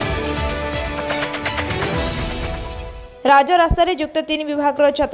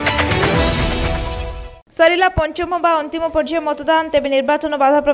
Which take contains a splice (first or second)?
second